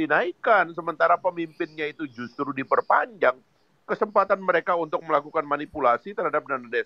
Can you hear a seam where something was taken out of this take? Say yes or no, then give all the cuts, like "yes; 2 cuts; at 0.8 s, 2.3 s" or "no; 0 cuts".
no; 0 cuts